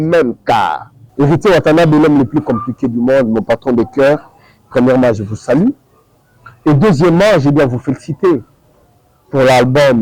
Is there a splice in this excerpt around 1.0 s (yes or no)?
yes